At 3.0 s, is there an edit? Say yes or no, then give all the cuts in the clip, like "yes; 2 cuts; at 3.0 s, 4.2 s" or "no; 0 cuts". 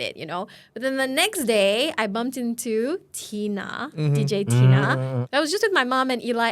no; 1 cut; at 5.2 s